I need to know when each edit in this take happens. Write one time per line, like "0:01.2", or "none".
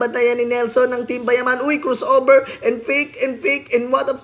none